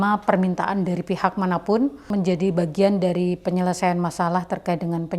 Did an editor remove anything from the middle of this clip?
yes; 1 cut; at 2.0 s

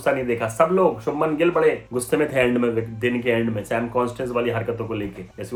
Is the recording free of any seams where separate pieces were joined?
yes; 0 cuts

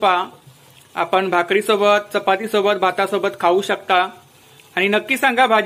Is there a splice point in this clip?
no; 0 cuts

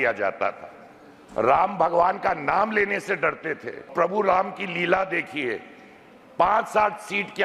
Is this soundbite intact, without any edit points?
no; 1 cut; at 3.9 s

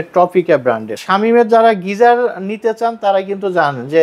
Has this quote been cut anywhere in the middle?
yes; 1 cut; at 0.9 s

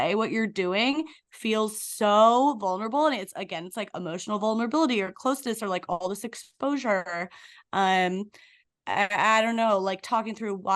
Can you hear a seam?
no; 0 cuts

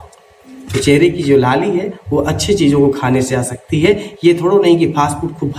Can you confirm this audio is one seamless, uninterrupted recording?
yes; 0 cuts

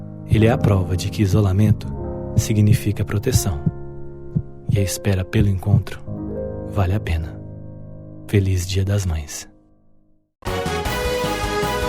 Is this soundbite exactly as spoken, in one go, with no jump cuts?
no; 1 cut; at 10.3 s

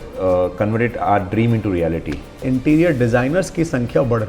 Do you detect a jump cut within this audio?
yes; 1 cut; at 2.4 s

